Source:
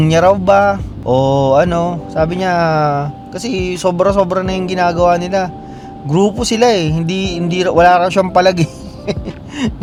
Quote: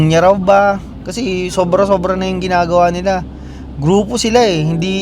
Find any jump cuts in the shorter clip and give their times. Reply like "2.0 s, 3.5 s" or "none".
0.9 s

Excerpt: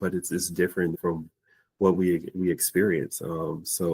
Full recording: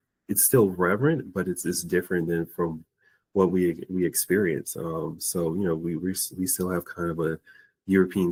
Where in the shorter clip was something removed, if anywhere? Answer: 0.9 s

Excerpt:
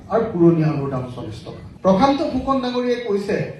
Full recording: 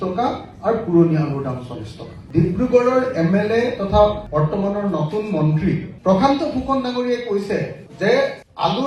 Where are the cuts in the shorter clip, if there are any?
1.7 s

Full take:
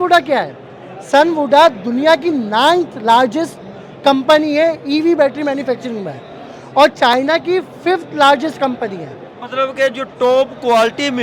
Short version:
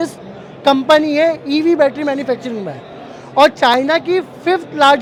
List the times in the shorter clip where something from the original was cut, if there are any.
none

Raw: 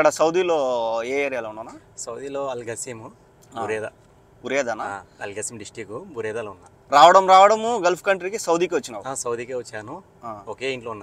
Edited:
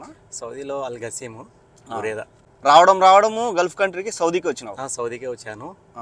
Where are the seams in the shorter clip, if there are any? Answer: 2.4 s

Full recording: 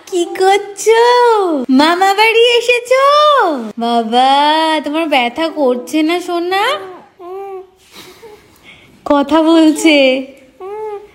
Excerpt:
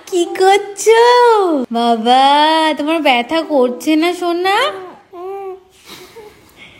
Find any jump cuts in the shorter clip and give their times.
1.6 s

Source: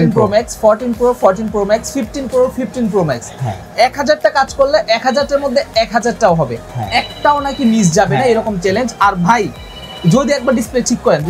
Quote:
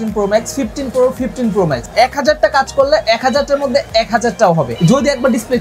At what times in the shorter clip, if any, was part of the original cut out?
1.9 s, 4.7 s

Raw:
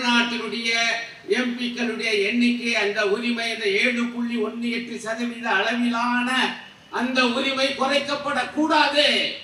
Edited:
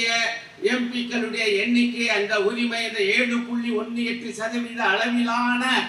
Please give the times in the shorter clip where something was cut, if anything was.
none

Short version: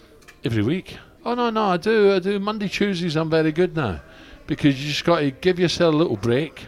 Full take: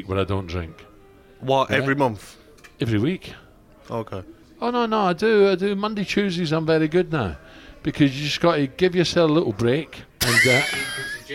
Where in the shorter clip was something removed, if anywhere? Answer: 1.0 s

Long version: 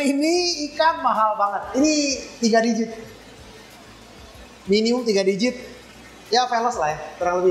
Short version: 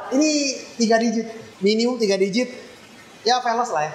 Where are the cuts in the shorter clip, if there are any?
1.4 s

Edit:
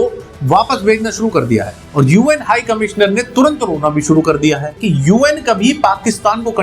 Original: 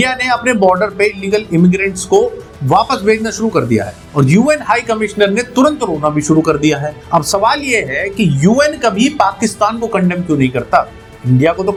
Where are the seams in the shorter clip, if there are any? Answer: 4.7 s

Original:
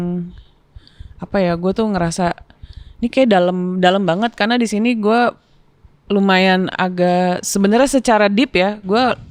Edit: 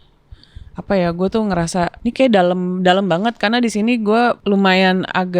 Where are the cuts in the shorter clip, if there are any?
2.0 s, 4.4 s

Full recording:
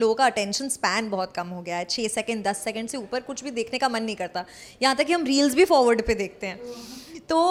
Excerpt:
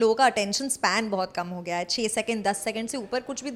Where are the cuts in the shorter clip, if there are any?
none

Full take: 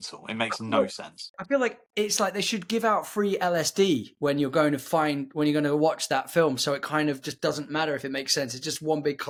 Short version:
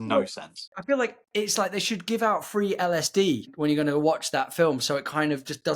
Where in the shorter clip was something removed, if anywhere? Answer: 3.5 s

